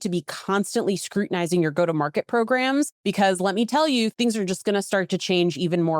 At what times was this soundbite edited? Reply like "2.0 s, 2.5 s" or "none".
3.0 s, 4.1 s